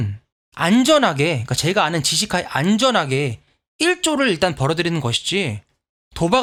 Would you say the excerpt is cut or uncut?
uncut